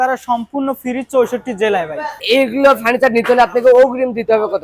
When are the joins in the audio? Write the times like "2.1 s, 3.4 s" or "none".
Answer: 2.2 s